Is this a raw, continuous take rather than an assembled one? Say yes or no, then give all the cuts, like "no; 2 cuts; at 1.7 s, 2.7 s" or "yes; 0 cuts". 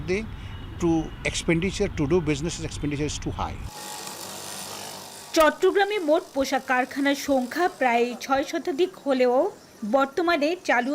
yes; 0 cuts